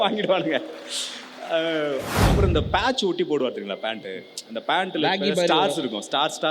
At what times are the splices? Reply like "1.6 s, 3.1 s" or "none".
2.1 s